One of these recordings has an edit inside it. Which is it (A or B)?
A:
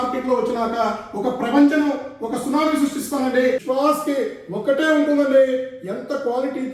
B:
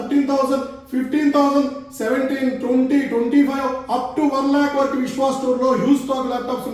A